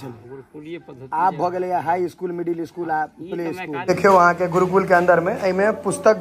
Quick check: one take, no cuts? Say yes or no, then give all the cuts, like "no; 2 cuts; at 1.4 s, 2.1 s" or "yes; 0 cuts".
no; 1 cut; at 3.7 s